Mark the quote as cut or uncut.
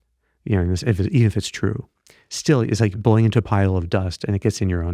cut